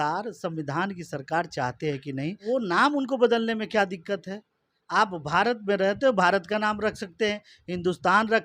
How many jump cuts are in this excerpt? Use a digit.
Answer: 1